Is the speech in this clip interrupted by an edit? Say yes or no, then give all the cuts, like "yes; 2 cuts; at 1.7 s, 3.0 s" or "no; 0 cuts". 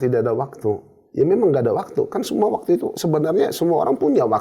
no; 0 cuts